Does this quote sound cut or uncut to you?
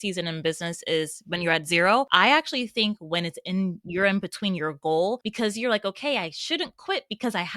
cut